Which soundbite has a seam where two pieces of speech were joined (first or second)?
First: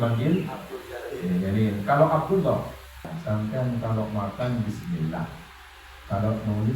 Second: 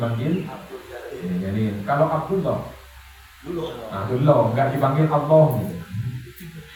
first